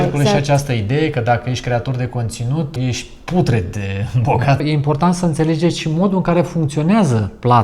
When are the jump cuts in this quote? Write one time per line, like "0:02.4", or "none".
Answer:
0:02.7
0:04.6